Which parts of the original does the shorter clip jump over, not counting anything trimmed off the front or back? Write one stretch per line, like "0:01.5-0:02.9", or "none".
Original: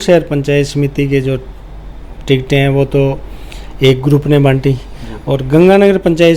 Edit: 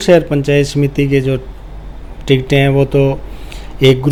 none

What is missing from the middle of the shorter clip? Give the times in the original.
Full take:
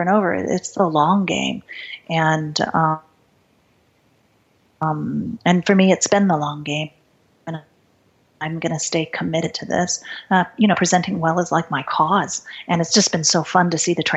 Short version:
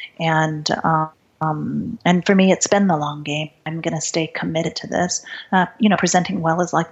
0:03.1-0:04.6
0:07.0-0:08.4

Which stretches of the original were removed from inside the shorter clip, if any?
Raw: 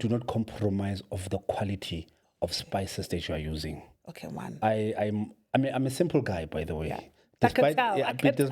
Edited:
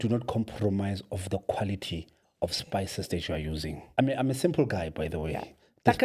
0:03.8-0:05.4

